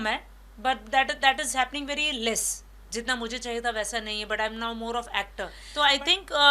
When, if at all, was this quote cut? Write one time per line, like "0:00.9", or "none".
0:05.6